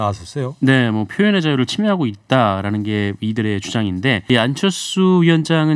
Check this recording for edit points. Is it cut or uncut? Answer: cut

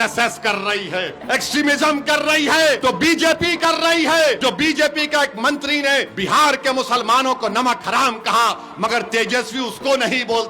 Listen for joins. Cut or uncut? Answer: cut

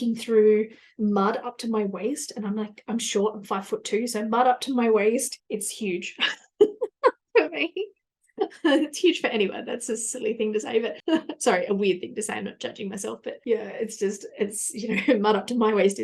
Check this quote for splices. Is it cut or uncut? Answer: uncut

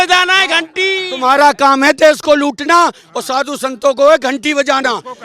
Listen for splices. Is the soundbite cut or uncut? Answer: uncut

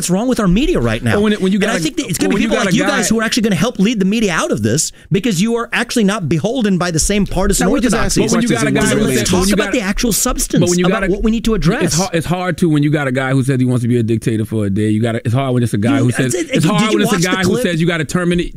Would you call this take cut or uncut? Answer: cut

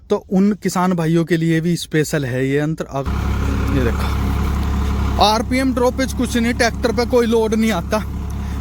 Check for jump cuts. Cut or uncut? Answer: cut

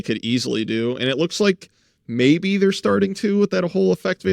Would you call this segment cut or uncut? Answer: uncut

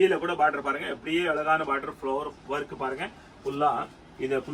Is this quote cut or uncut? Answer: uncut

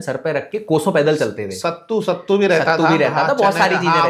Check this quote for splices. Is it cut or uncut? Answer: uncut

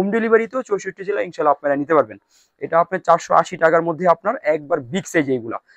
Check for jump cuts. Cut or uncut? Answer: uncut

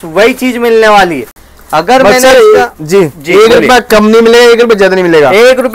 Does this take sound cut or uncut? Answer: uncut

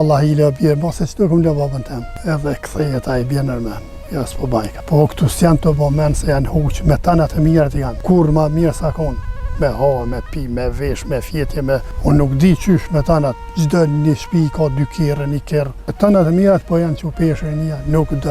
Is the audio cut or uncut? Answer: cut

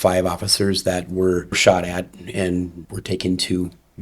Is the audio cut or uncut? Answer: cut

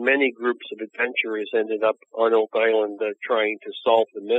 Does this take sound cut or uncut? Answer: uncut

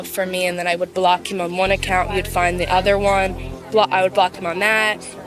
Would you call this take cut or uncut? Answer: uncut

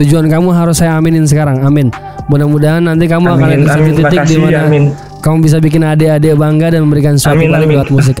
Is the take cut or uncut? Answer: uncut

